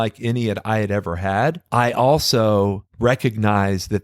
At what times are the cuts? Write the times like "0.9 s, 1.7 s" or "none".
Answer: 1.6 s, 2.9 s